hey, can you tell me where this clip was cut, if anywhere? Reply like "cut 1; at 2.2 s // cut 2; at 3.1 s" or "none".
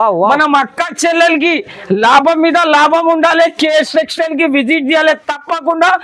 none